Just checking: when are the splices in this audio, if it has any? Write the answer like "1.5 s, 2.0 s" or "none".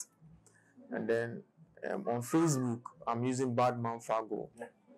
none